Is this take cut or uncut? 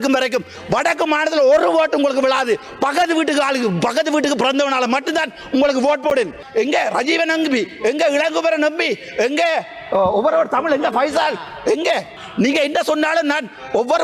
cut